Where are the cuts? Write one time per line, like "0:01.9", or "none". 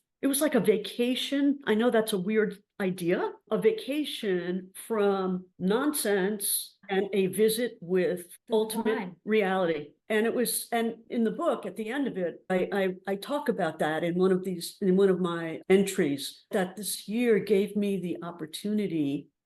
0:12.5
0:15.6
0:16.5